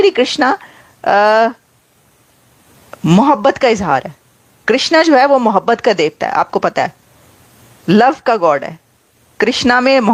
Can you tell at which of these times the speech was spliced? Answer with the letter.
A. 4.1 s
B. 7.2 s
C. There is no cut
C